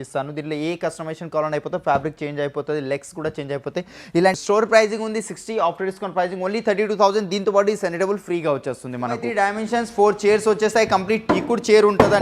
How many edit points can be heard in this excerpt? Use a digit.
2